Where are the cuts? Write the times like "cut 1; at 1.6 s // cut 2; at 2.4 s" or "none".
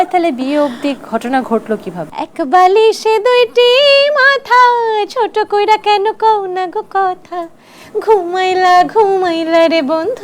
cut 1; at 2.0 s